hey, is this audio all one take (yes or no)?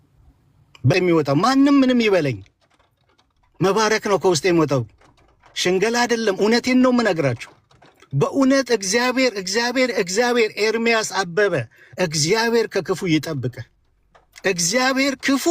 no